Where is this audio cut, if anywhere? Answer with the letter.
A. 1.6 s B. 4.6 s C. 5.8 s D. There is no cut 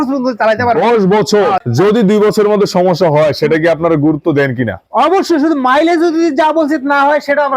A